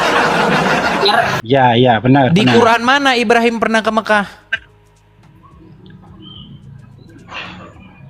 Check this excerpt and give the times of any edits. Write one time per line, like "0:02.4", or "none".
0:01.4

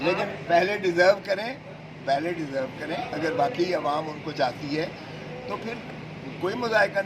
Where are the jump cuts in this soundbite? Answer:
none

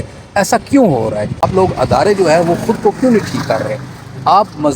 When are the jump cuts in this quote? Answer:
0:01.4

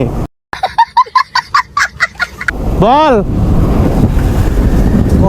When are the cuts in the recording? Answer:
0:02.5

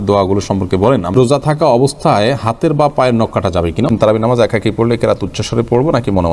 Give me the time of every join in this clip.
0:01.1
0:04.0

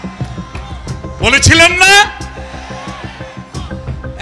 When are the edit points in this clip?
none

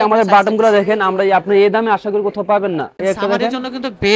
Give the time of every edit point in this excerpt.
0:02.9

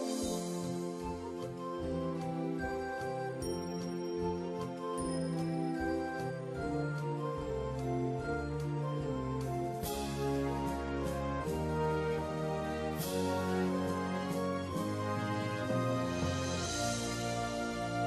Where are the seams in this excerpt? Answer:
0:16.9

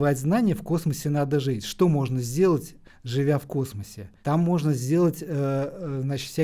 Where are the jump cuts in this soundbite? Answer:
none

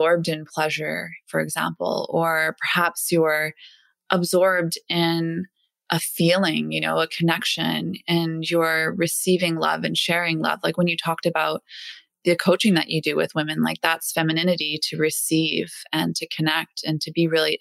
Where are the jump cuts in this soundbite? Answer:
none

